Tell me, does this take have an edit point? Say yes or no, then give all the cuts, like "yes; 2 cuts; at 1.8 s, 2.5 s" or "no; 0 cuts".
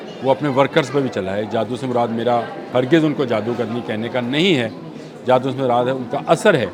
no; 0 cuts